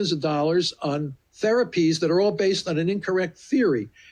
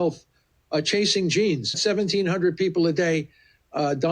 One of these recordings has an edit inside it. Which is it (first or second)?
second